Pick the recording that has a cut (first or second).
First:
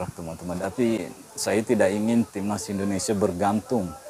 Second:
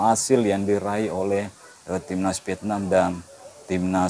first